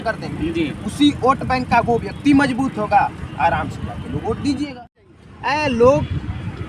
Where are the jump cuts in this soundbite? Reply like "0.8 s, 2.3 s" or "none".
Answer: 4.9 s